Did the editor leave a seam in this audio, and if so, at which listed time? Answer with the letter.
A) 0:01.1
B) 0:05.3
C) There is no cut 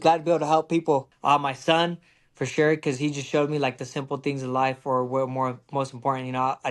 A